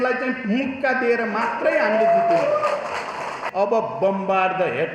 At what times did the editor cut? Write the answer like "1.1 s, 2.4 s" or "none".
3.3 s